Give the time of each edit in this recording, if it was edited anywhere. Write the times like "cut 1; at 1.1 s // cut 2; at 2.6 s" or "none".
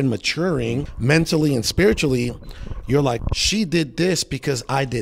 cut 1; at 0.9 s // cut 2; at 3.2 s